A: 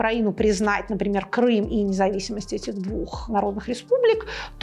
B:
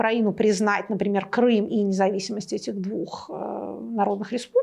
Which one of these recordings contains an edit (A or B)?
A